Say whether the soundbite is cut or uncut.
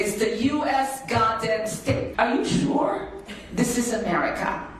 cut